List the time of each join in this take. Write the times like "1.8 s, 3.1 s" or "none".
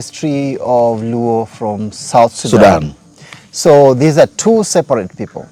none